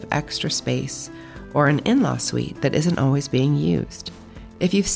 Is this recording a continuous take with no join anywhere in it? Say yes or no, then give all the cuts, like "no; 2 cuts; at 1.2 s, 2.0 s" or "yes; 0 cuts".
yes; 0 cuts